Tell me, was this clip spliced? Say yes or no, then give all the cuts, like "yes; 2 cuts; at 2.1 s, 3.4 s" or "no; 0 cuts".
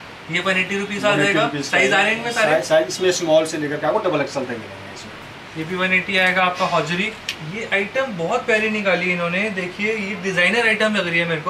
yes; 1 cut; at 7.4 s